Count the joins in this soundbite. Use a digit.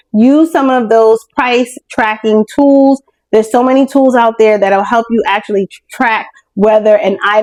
0